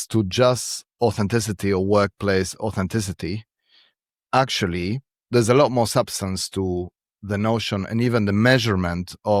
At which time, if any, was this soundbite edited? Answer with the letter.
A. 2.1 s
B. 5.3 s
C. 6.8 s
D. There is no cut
D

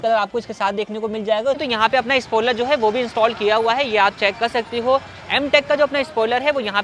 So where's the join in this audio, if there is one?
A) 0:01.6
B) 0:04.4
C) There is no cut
A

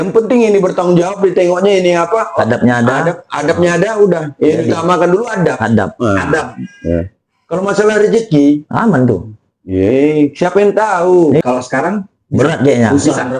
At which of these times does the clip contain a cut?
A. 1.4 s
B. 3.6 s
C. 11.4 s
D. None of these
C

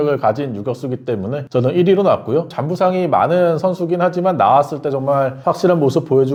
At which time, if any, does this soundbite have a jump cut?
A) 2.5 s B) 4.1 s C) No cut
C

